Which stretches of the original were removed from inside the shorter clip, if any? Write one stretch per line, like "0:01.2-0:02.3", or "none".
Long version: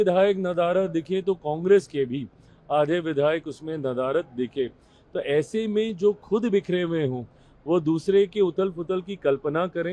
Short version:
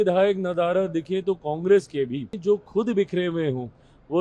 0:02.4-0:05.9